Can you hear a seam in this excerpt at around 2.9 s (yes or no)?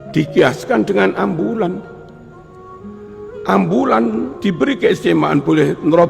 no